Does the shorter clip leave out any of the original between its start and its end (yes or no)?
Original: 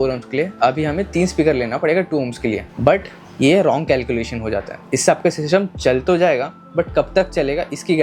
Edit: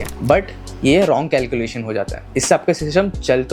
no